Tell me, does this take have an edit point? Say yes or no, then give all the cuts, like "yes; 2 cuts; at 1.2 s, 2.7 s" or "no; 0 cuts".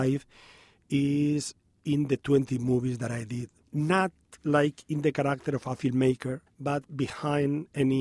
yes; 3 cuts; at 3.6 s, 4.3 s, 6.5 s